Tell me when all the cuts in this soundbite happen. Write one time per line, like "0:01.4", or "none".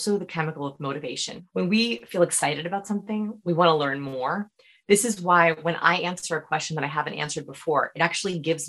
0:01.3